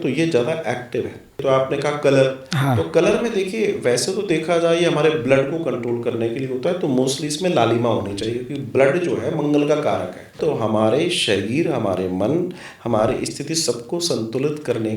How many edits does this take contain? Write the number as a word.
two